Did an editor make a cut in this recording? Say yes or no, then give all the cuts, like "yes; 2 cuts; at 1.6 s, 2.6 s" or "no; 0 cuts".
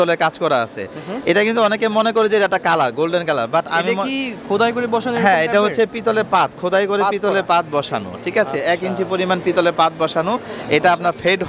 no; 0 cuts